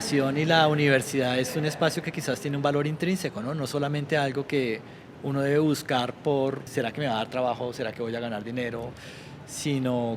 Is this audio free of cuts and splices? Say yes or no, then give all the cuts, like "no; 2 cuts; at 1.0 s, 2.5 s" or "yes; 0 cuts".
no; 1 cut; at 6.7 s